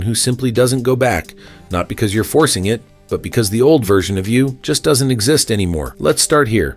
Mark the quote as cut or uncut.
uncut